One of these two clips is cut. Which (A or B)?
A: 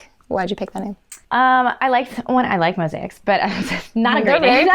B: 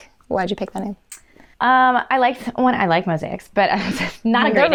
A